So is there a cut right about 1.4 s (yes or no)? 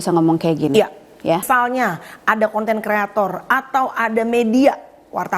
yes